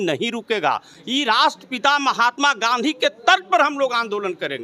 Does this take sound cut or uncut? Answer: uncut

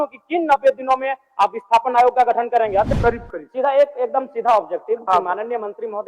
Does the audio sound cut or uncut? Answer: cut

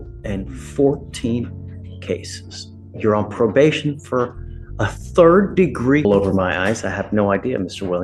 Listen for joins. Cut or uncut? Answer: cut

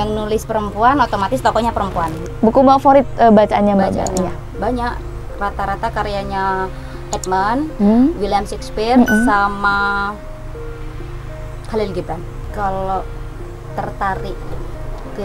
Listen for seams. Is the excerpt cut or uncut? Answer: cut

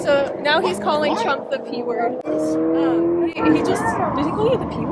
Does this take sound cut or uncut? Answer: uncut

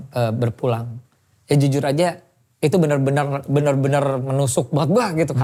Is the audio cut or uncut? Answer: uncut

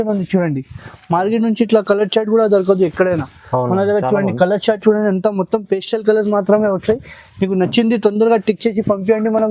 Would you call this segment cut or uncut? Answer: uncut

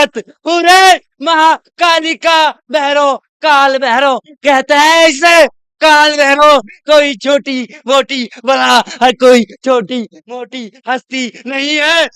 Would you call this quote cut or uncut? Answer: uncut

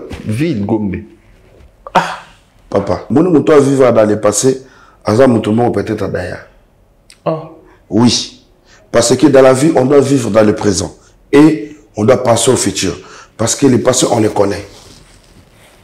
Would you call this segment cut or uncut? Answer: cut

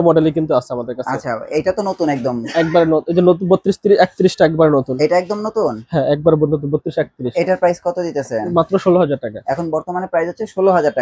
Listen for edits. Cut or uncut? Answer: uncut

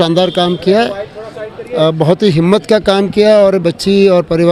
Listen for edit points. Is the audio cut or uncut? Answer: uncut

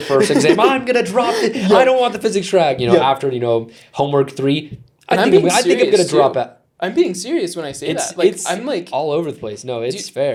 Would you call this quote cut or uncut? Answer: uncut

